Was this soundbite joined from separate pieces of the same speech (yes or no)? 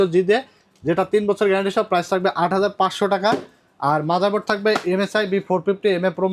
no